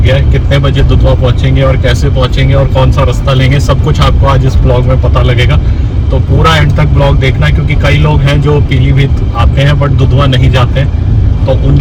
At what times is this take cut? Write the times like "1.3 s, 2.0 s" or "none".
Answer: none